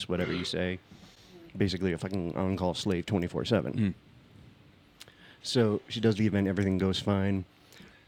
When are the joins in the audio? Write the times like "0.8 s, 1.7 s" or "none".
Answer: none